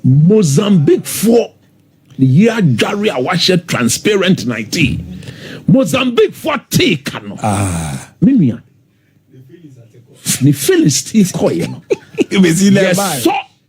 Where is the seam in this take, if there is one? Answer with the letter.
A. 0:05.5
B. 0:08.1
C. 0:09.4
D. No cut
D